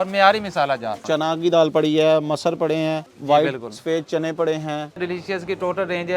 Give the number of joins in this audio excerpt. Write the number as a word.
three